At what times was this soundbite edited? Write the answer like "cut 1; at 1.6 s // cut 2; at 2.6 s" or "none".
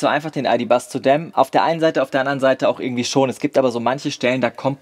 none